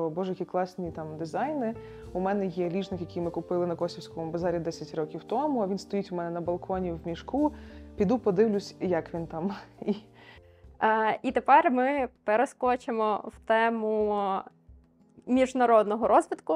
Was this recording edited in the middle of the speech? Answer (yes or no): no